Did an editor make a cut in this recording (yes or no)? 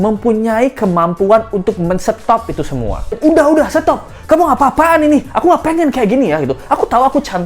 yes